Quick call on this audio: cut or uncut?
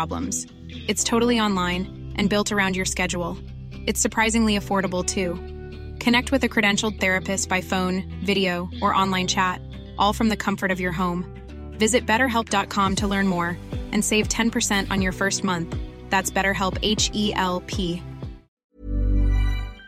cut